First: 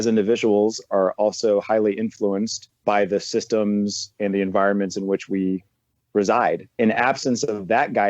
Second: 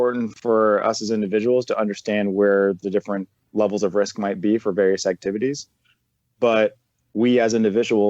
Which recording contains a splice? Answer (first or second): first